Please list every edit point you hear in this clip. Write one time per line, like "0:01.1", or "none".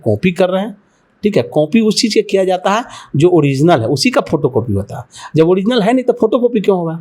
none